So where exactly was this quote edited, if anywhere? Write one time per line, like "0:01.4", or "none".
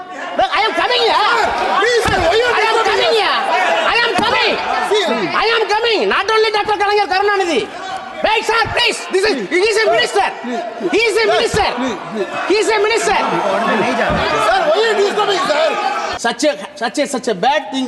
0:16.1